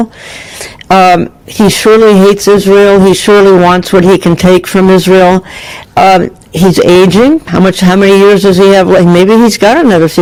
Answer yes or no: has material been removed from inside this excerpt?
no